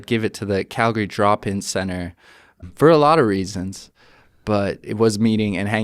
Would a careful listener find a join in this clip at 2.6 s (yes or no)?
yes